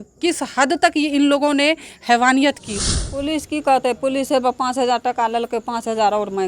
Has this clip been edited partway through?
yes; 1 cut; at 2.7 s

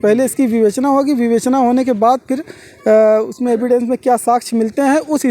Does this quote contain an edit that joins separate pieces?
no; 0 cuts

